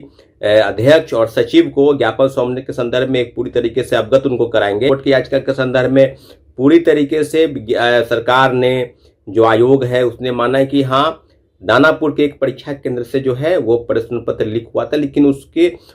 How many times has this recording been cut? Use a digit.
1